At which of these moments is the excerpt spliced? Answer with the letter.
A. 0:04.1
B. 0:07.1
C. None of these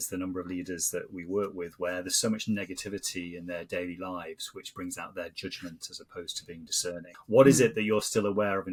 C